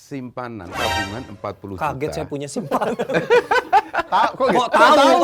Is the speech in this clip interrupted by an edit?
no; 0 cuts

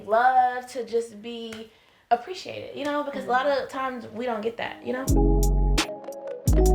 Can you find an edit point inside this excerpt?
yes; 1 cut; at 5.0 s

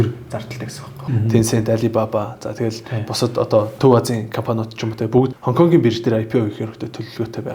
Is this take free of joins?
no; 3 cuts; at 1.0 s, 3.7 s, 5.4 s

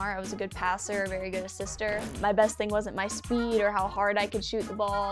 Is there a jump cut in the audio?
yes; 1 cut; at 2.1 s

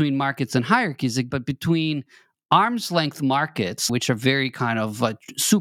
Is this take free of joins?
no; 2 cuts; at 1.3 s, 3.9 s

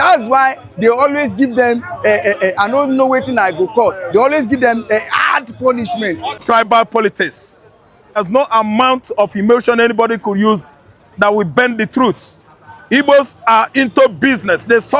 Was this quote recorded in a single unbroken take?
no; 2 cuts; at 6.4 s, 8.2 s

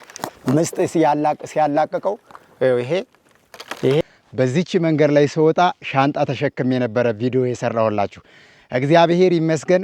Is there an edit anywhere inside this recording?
yes; 1 cut; at 4.0 s

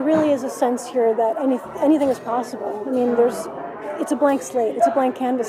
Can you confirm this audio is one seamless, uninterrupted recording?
yes; 0 cuts

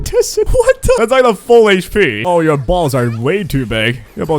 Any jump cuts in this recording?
yes; 2 cuts; at 1.0 s, 2.2 s

